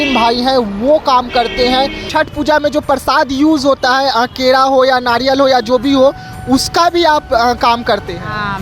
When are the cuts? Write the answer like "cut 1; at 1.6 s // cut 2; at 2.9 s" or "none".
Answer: cut 1; at 2.0 s